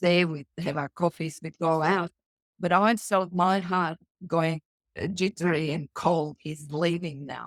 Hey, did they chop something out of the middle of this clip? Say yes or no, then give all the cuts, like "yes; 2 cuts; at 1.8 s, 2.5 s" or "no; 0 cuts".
no; 0 cuts